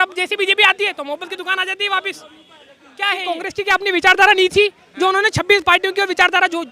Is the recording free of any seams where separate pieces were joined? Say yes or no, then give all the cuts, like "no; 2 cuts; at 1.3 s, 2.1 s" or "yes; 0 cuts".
no; 1 cut; at 3.2 s